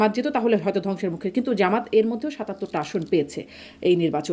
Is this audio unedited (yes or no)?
yes